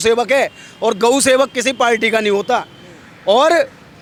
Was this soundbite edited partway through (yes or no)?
no